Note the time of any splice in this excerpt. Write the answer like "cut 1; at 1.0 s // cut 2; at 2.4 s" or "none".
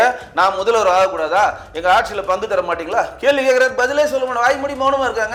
none

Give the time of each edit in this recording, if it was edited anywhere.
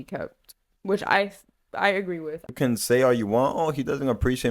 cut 1; at 2.5 s

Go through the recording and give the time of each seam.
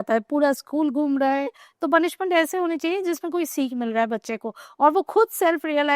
cut 1; at 1.6 s

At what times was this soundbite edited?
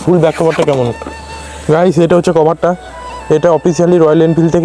none

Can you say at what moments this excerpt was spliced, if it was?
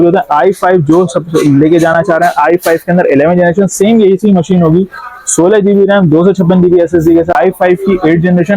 cut 1; at 7.3 s

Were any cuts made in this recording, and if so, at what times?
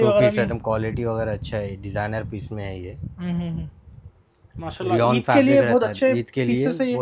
none

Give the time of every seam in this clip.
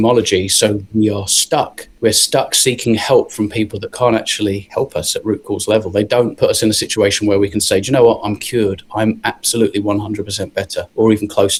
none

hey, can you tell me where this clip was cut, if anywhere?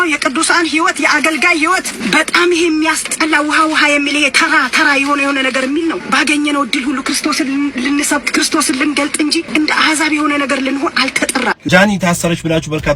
cut 1; at 2.0 s // cut 2; at 6.0 s // cut 3; at 9.5 s // cut 4; at 11.6 s

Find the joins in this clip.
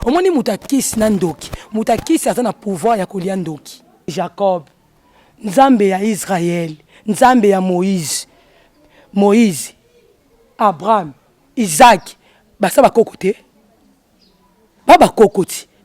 cut 1; at 4.1 s

